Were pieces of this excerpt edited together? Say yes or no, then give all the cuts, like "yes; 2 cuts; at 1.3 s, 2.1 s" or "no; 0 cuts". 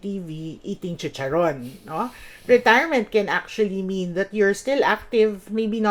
no; 0 cuts